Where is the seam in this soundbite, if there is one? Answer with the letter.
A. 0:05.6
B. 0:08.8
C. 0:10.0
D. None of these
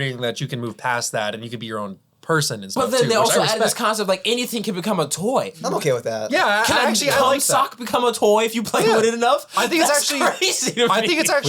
A